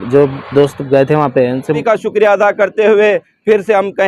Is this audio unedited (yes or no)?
no